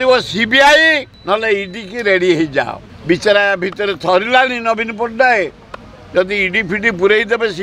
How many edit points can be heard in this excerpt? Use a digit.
2